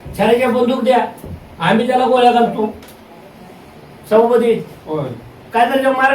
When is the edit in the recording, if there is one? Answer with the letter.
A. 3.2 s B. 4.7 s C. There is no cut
C